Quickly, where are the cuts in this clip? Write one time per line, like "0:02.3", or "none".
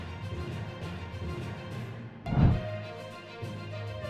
0:01.5